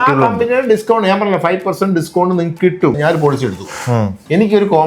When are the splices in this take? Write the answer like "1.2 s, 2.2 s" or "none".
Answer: 3.0 s